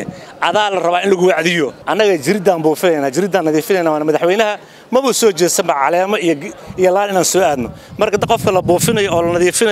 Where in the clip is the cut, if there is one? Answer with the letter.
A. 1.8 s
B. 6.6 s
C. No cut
A